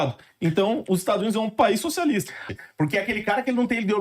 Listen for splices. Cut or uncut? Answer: cut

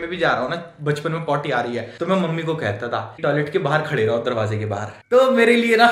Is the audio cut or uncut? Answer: cut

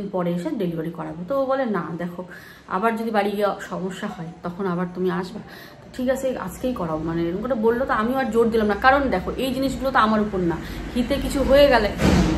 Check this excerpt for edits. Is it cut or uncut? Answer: uncut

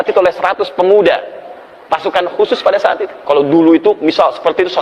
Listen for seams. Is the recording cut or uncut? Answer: cut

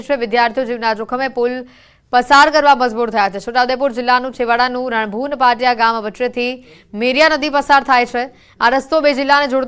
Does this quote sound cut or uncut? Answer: cut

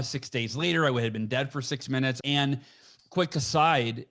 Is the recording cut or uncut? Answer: cut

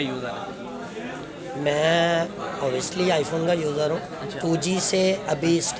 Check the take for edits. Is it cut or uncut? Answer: uncut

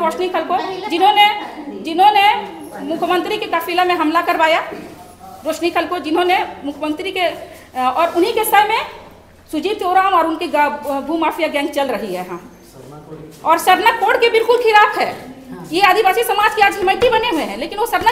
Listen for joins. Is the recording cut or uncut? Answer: uncut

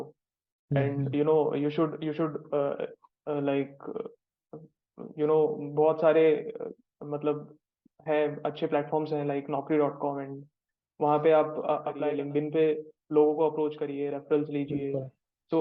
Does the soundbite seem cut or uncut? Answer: cut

